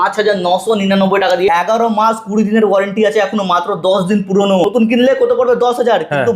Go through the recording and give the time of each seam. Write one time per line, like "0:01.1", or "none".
0:01.5
0:04.6

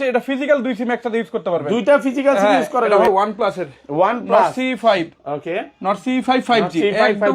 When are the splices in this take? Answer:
0:03.1

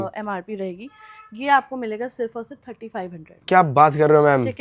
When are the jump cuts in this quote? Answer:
none

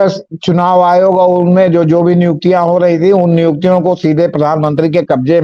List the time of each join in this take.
none

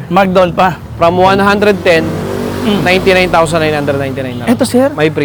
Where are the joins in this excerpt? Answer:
none

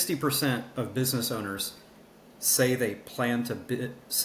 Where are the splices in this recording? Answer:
none

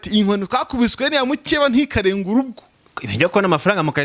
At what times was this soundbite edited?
0:02.6

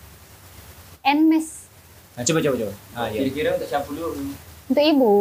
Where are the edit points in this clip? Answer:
none

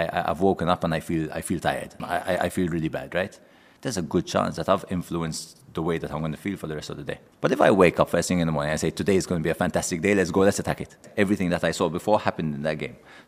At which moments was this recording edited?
0:02.0
0:07.3
0:11.1

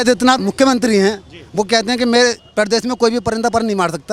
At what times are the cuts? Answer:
none

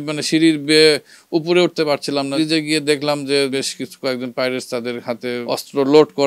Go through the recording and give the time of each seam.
0:02.3
0:03.5
0:05.4

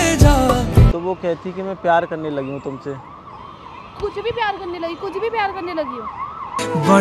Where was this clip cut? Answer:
0:01.0

